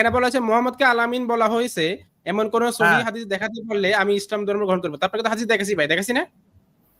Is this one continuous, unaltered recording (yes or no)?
yes